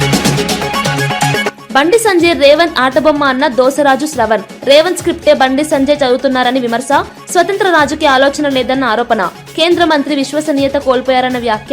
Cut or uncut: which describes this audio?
cut